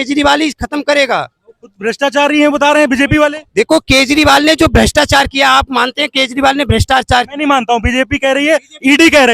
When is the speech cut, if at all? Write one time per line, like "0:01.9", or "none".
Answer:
none